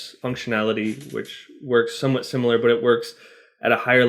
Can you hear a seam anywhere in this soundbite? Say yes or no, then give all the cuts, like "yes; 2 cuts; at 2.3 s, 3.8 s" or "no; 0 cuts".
no; 0 cuts